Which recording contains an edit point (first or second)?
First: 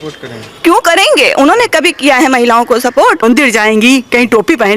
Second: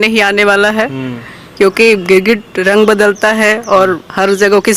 first